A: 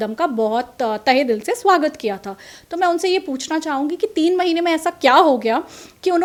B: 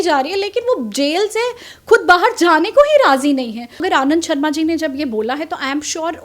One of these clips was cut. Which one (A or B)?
B